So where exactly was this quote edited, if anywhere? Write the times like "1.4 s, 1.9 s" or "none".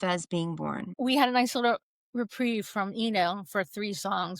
0.9 s